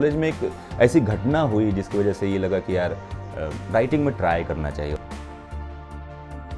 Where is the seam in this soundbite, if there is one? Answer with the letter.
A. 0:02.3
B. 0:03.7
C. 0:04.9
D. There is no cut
C